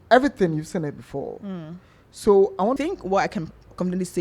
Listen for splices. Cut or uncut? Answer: cut